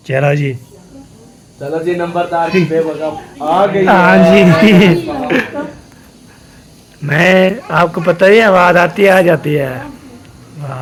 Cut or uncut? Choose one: uncut